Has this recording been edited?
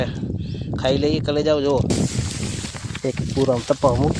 yes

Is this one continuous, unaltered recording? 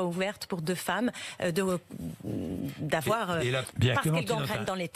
yes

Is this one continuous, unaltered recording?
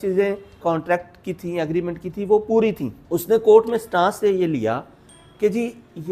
yes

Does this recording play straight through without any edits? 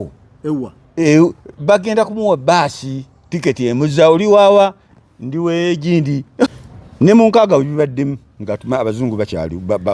no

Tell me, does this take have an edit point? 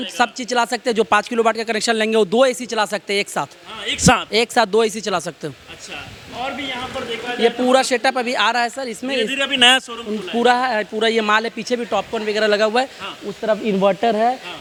no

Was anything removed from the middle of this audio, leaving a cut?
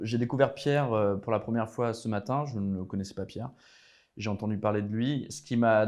no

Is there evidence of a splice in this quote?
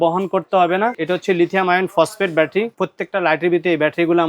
yes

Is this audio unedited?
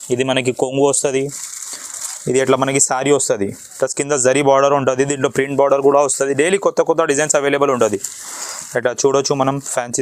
yes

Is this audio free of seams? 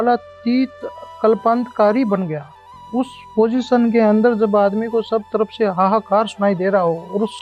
yes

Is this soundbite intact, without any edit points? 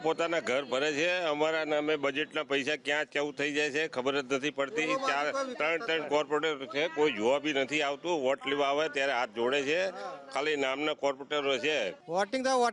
yes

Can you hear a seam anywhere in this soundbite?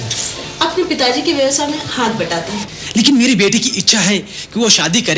yes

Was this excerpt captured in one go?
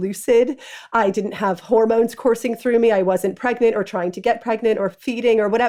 yes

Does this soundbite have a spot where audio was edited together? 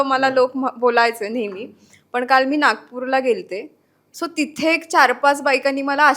no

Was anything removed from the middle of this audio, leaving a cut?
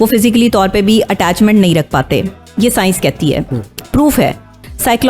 no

